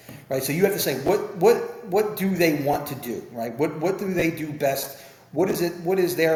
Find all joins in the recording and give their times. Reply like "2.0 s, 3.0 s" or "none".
none